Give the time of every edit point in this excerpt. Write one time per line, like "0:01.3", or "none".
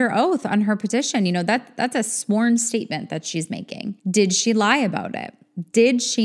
0:04.0